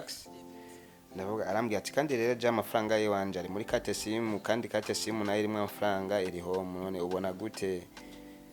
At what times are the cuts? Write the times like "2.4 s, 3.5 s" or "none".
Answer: none